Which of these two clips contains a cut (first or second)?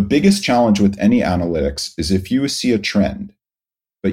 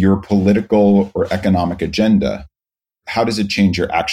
second